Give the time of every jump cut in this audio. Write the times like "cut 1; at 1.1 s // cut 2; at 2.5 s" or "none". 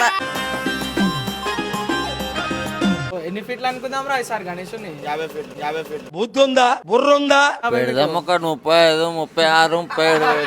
cut 1; at 3.1 s // cut 2; at 7.6 s